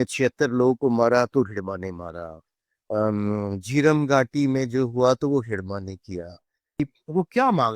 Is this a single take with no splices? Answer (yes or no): no